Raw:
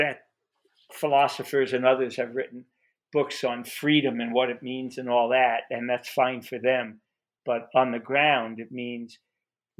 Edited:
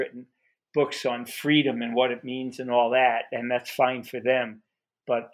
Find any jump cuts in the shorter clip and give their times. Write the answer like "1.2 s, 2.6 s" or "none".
none